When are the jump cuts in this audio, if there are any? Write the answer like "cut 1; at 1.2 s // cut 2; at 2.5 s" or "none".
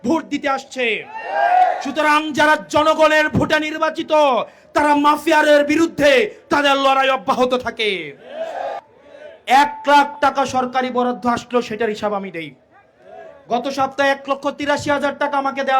cut 1; at 8.8 s